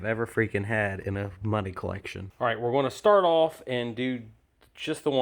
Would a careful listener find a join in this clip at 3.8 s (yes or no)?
no